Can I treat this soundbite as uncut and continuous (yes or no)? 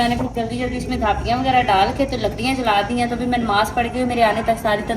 yes